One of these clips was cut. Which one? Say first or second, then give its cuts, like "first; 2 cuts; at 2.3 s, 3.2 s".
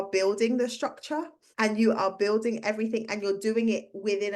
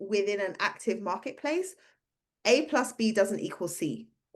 first; 1 cut; at 1.4 s